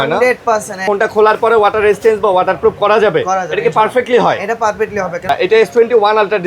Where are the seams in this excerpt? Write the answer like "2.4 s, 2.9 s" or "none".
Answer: 0.8 s, 5.3 s